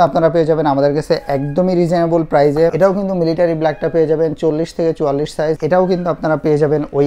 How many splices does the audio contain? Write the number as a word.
two